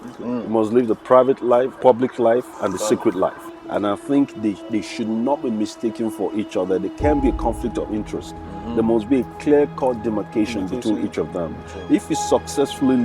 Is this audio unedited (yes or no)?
no